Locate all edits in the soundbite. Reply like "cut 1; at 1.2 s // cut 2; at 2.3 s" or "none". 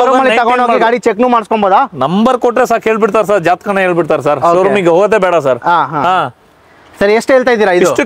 none